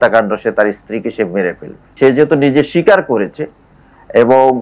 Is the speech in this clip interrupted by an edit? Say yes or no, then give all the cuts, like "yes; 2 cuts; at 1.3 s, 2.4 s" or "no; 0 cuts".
no; 0 cuts